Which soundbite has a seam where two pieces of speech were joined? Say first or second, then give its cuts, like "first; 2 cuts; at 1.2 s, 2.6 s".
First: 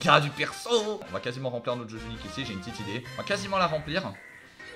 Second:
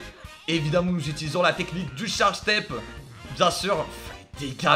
first; 2 cuts; at 1.1 s, 3.1 s